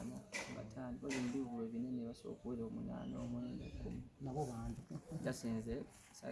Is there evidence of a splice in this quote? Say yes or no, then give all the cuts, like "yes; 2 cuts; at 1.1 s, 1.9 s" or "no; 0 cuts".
yes; 1 cut; at 5.0 s